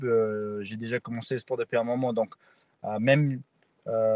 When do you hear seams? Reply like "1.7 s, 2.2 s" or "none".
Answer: none